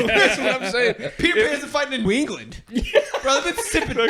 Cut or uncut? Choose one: cut